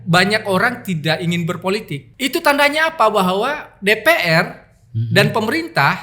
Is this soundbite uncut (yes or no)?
no